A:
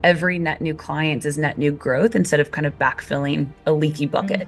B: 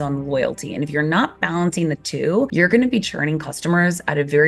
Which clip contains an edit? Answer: B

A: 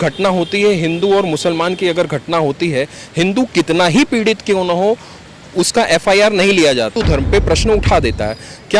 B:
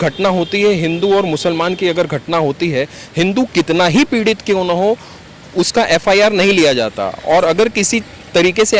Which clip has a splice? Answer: A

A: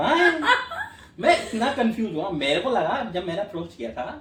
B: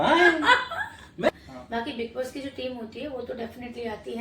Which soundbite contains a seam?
B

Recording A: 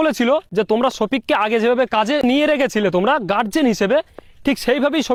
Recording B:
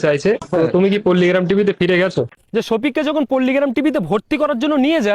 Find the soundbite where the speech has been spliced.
B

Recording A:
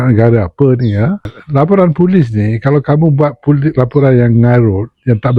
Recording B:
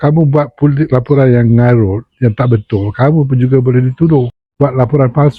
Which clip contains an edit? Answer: A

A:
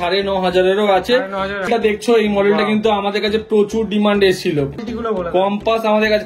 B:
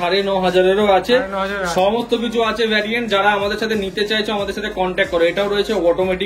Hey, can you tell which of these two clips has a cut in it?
A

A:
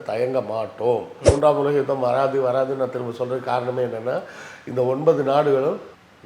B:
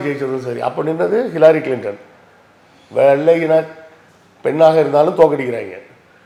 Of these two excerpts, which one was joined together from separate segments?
A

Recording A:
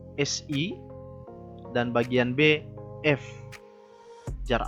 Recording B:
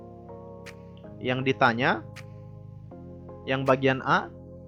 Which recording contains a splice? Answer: B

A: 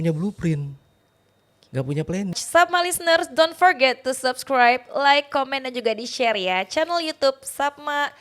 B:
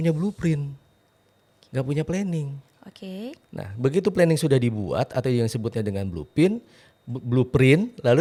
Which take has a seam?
A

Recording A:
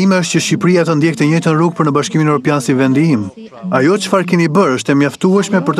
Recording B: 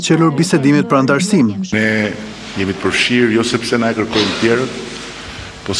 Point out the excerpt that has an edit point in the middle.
B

